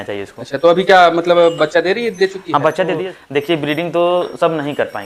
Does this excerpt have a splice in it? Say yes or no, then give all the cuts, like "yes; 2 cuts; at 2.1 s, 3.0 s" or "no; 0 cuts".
yes; 1 cut; at 2.9 s